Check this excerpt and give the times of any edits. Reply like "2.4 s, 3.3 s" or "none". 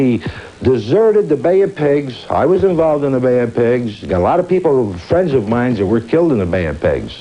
1.2 s

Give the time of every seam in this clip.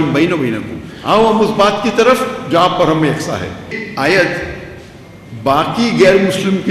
3.8 s

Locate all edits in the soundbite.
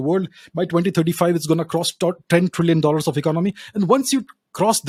none

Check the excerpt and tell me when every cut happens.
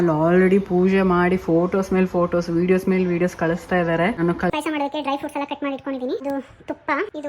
4.5 s

